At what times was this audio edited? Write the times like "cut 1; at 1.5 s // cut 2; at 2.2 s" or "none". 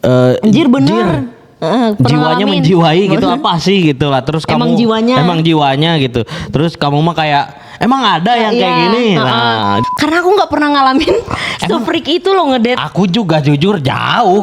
cut 1; at 9.8 s